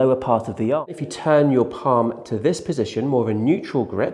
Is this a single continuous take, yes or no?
no